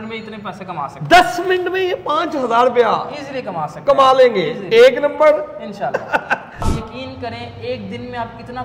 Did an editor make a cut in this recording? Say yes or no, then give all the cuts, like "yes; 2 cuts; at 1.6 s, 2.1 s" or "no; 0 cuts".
yes; 1 cut; at 6.7 s